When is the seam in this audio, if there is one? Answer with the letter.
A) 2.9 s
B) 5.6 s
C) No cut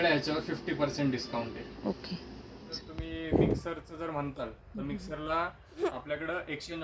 A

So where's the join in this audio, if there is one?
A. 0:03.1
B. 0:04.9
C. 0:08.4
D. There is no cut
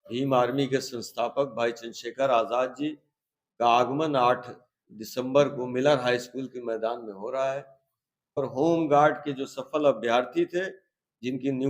C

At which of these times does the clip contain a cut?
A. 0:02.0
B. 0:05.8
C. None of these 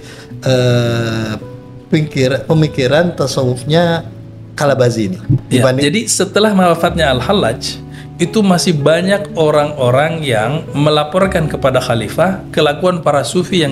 B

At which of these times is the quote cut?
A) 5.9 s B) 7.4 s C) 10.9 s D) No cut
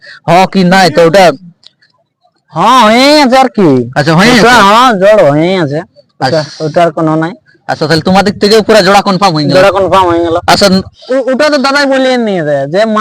C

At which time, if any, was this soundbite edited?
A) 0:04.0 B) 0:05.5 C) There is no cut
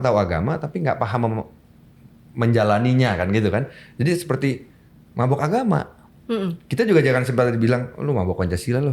C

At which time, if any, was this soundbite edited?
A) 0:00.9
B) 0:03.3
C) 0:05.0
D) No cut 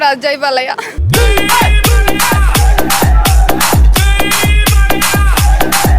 A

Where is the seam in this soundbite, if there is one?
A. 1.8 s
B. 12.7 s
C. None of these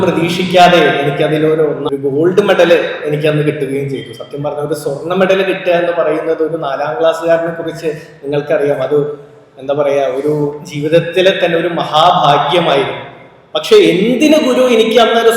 A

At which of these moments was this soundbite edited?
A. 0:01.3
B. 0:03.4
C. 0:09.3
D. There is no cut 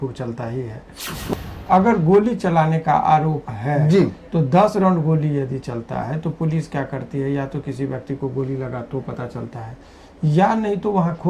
A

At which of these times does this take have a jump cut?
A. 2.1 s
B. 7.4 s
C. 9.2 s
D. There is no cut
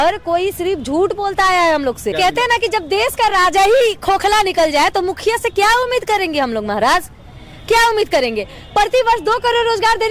A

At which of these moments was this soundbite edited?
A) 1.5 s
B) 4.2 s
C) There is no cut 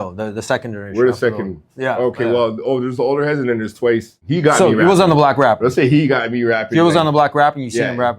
B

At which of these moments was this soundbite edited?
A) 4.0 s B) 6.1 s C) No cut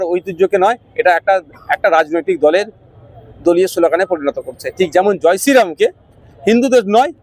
C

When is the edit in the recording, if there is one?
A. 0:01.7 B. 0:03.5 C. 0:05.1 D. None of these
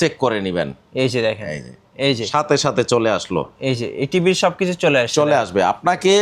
D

